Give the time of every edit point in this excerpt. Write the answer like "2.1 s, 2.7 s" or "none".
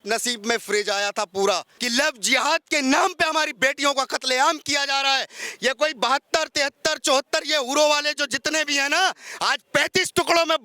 1.7 s